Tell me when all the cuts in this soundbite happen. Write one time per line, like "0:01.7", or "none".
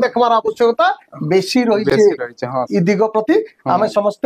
none

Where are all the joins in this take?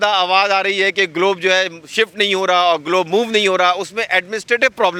none

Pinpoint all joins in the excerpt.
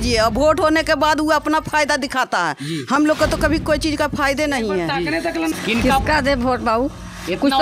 0:05.5

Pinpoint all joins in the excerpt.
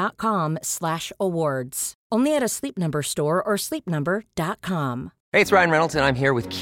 0:05.1

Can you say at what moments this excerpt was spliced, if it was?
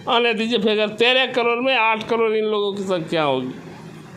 none

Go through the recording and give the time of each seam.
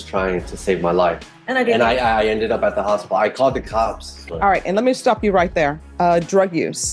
0:01.3
0:04.1
0:05.8

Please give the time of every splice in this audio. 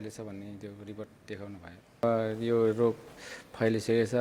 0:02.0

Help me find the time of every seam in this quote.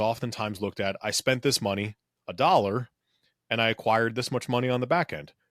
none

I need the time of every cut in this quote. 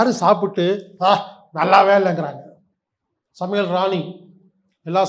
none

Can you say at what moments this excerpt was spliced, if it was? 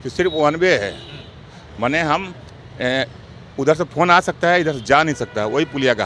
none

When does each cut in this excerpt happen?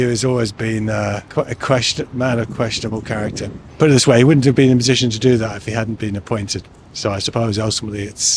none

